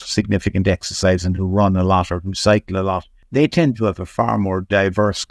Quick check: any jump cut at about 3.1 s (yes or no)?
yes